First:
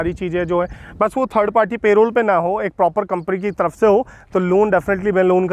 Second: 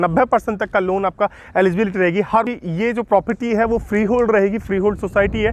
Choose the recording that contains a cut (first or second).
second